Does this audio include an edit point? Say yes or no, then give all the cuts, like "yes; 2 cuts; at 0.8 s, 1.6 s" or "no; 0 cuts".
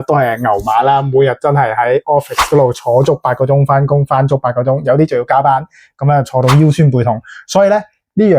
no; 0 cuts